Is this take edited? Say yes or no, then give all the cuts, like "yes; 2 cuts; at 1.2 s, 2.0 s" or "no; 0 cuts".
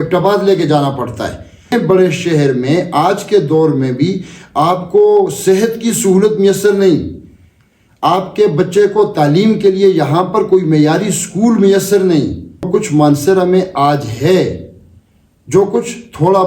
yes; 2 cuts; at 1.7 s, 12.7 s